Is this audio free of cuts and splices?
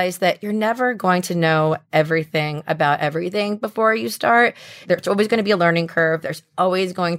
no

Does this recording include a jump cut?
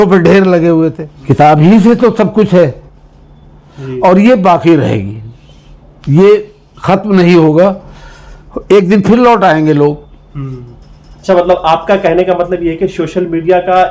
yes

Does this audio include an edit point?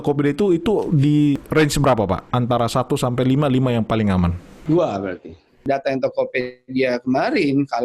yes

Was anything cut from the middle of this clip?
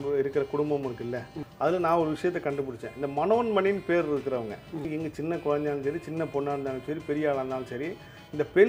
yes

